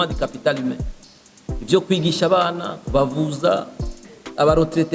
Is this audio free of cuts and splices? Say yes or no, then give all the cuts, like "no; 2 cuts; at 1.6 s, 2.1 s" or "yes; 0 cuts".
yes; 0 cuts